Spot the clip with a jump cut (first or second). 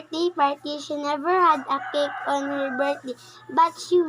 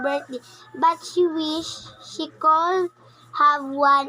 second